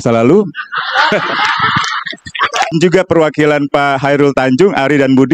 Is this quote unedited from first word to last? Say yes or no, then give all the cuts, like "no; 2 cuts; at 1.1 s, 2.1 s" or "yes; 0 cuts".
no; 1 cut; at 2.7 s